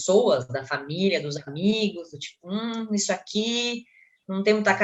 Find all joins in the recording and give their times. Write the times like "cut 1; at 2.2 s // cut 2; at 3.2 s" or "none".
none